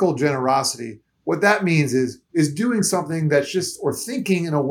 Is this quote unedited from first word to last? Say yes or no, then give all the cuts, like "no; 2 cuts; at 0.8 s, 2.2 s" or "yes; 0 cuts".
no; 1 cut; at 2.2 s